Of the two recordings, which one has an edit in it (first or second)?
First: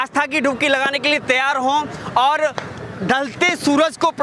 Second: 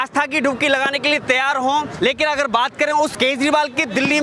second